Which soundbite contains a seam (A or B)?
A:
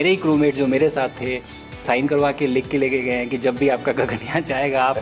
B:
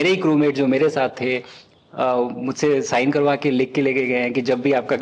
A